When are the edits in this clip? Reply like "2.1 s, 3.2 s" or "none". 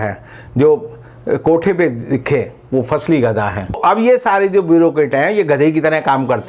3.8 s